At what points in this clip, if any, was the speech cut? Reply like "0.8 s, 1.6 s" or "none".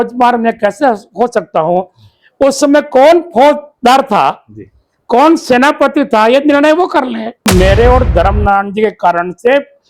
7.5 s